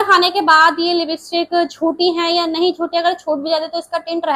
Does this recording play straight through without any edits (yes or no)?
yes